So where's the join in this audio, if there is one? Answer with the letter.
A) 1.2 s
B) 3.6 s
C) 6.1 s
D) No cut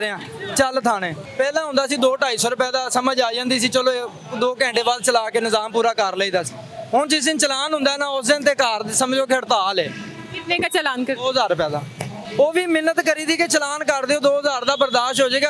A